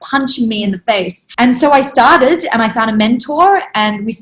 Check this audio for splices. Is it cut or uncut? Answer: cut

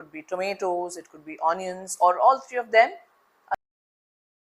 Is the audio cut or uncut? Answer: uncut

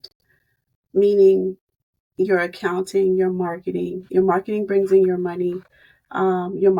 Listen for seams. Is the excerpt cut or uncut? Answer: uncut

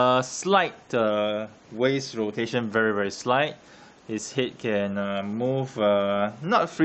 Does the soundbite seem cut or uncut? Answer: cut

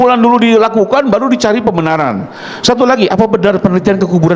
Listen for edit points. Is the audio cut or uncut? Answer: uncut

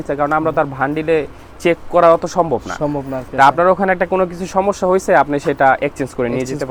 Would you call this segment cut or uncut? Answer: uncut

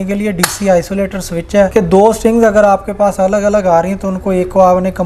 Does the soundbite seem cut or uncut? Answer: cut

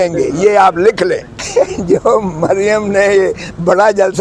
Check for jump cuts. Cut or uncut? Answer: cut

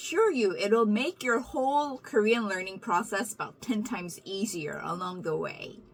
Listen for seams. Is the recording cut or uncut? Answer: uncut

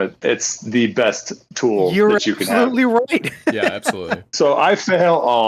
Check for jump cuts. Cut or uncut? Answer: uncut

